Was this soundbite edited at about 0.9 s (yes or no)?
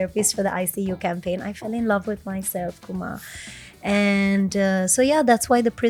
no